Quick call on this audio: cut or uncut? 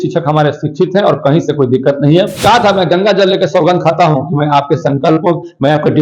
cut